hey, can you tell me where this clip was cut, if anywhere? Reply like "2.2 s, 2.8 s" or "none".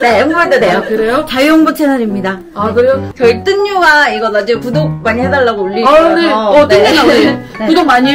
3.1 s